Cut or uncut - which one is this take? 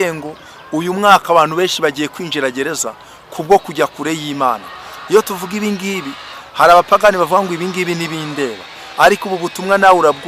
uncut